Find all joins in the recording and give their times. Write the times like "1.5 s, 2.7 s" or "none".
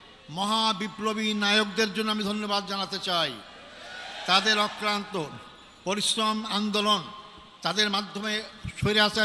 none